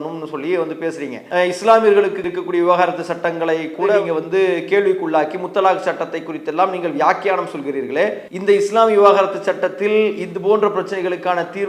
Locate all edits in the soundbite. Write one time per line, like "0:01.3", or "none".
0:01.2
0:08.3